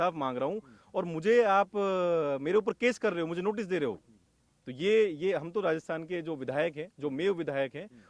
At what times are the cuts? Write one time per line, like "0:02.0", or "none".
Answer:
none